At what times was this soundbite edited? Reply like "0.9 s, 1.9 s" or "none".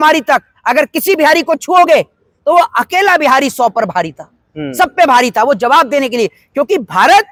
none